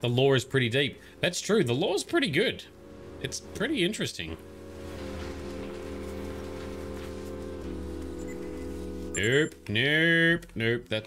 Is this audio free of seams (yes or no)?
yes